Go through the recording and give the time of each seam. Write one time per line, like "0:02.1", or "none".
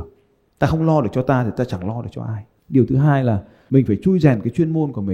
0:03.5